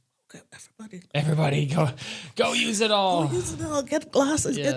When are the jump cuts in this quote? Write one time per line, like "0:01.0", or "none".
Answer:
none